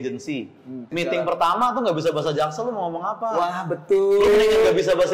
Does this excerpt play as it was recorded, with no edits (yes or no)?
no